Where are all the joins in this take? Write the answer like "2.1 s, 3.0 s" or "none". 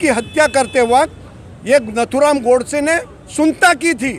none